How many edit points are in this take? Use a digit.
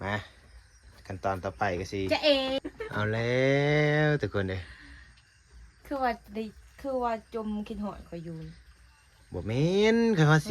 1